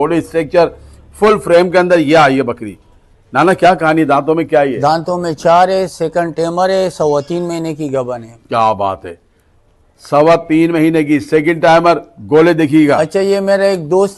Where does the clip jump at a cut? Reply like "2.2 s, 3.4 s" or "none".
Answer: none